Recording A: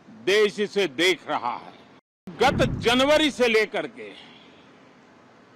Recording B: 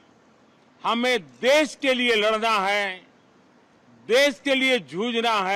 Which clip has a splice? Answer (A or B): A